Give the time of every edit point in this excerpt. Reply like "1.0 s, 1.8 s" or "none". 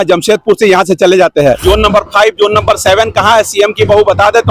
1.6 s

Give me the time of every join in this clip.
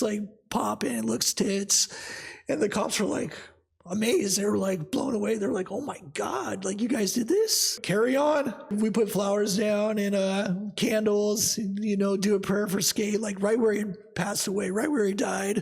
7.8 s, 8.7 s

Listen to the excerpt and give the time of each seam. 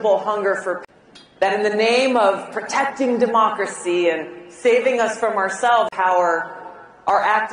none

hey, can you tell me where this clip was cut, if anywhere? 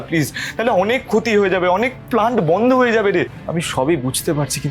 3.4 s

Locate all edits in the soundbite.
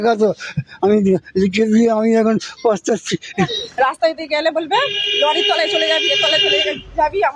3.6 s

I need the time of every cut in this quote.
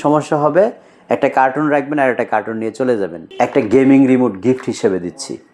3.2 s

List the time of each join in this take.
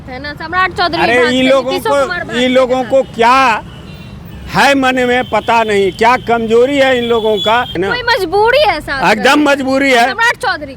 7.7 s

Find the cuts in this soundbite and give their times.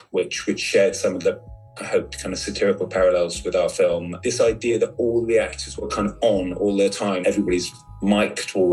4.1 s, 7.2 s

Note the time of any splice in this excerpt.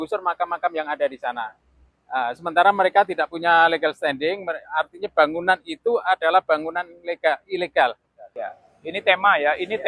8.3 s

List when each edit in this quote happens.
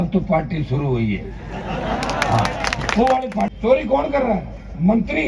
3.5 s

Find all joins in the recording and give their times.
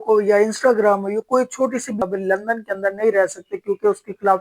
2.0 s

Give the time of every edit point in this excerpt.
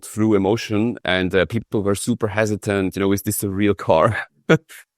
1.0 s

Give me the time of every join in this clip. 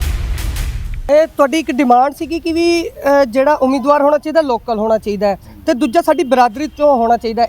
1.1 s

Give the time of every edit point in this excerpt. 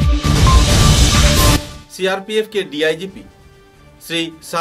1.7 s

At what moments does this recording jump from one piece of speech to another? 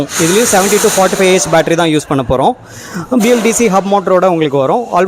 none

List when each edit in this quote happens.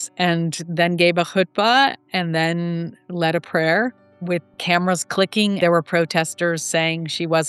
none

